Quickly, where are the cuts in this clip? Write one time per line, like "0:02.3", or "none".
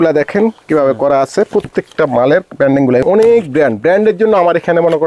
0:03.0